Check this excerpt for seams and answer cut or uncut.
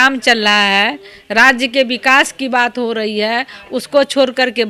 uncut